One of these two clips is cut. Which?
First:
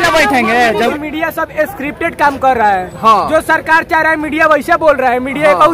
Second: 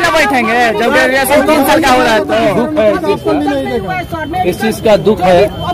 first; 1 cut; at 0.9 s

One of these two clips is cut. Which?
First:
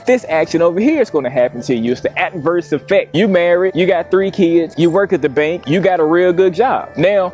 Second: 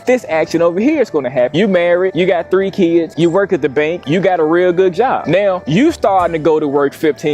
second; 2 cuts; at 1.5 s, 5.2 s

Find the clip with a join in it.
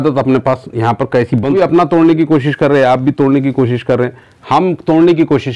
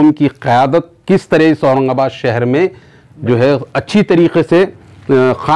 first; 1 cut; at 1.5 s

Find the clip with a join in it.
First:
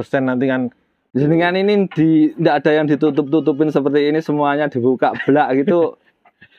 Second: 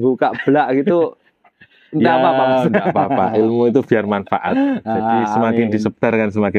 first; 1 cut; at 1.0 s

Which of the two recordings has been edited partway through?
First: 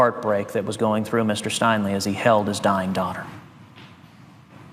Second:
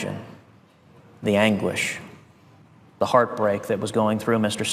first; 1 cut; at 2.6 s

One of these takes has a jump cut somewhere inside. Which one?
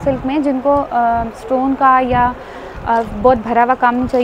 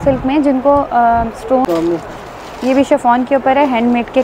second; 1 cut; at 1.6 s

